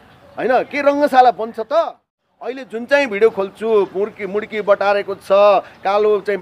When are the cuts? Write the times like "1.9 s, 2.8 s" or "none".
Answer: 2.7 s